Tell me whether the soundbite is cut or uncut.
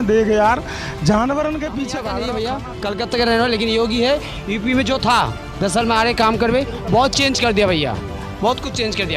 cut